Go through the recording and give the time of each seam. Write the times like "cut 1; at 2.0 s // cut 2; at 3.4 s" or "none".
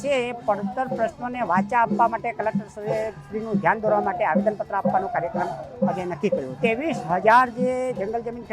cut 1; at 6.5 s